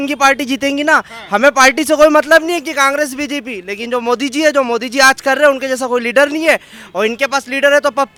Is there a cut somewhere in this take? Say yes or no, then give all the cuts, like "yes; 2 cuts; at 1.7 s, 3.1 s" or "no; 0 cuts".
no; 0 cuts